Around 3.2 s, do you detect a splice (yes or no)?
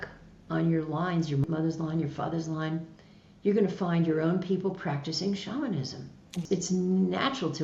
no